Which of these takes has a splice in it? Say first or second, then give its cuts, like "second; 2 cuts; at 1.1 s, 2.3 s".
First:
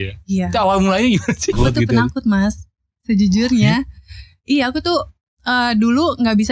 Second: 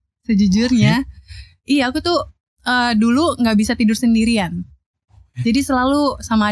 first; 1 cut; at 1.6 s